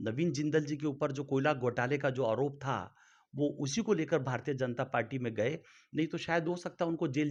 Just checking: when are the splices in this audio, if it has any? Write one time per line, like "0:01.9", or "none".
none